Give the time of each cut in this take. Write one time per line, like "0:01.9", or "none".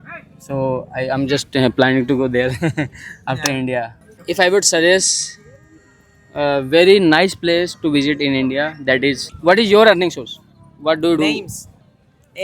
0:04.0
0:09.3

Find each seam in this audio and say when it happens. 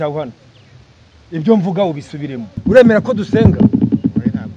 0:02.5

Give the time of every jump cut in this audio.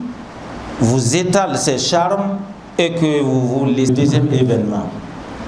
0:03.9

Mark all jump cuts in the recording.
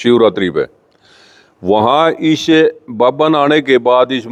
none

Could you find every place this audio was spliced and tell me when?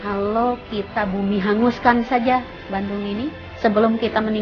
0:03.4

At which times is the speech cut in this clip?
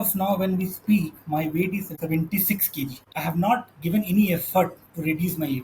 0:01.9
0:03.1

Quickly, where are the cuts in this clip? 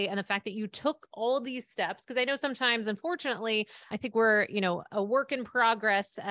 0:03.9

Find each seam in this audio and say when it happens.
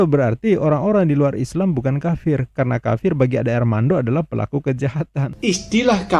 0:05.3

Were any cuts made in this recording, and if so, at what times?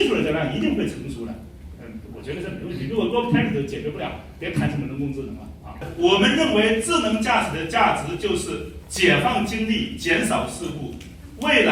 0:05.8

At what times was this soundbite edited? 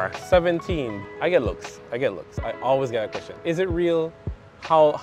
0:01.0

